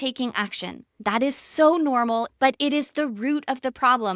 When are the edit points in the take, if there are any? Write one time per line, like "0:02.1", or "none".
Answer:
0:00.9
0:02.3